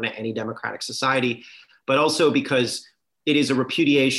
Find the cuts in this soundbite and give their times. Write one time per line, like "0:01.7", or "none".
none